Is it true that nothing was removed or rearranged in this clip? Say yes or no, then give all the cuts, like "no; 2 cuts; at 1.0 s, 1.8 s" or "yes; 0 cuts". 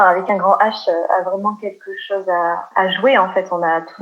no; 1 cut; at 2.7 s